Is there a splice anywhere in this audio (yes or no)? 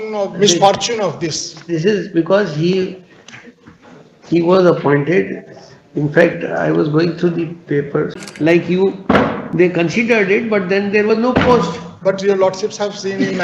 yes